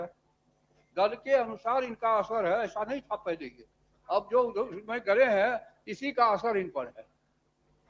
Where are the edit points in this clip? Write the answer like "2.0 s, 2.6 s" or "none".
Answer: none